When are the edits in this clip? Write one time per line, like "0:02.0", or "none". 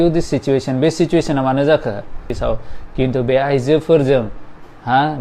0:02.3